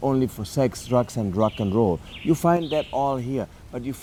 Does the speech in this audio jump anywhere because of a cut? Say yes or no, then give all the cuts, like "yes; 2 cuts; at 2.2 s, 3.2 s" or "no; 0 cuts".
no; 0 cuts